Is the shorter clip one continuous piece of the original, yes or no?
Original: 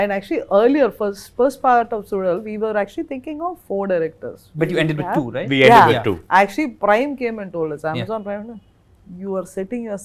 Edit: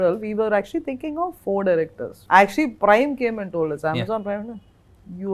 no